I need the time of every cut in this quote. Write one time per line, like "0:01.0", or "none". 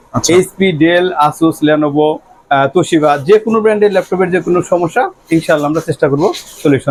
none